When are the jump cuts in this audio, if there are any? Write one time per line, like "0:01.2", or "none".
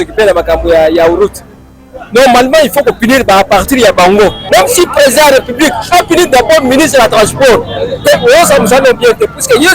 0:04.4